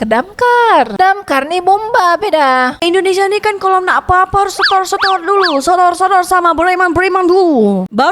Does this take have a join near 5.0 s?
no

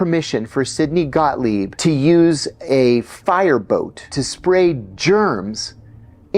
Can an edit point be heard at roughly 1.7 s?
yes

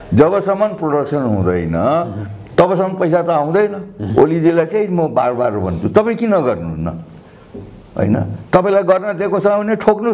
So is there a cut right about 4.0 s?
yes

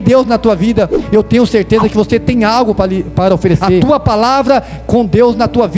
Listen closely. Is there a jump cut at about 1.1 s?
no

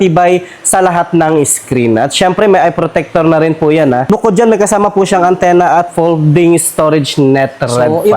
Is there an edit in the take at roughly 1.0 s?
no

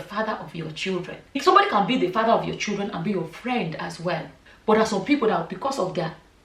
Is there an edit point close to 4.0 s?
no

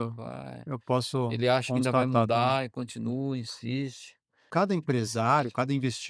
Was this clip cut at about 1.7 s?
no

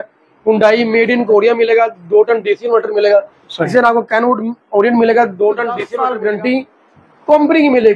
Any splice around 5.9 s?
yes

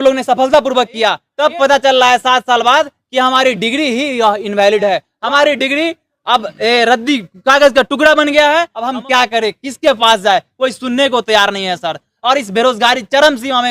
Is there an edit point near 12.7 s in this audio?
no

